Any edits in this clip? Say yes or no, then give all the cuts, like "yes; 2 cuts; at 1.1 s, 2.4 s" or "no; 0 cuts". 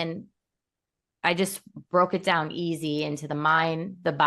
no; 0 cuts